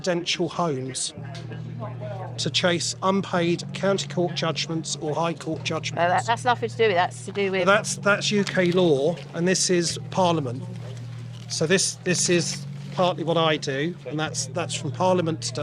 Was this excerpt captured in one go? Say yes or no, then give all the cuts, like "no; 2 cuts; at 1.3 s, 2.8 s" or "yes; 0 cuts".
yes; 0 cuts